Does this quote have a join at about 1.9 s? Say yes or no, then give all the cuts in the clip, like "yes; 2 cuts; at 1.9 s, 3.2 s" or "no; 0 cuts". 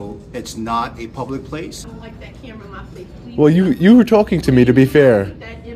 yes; 1 cut; at 1.9 s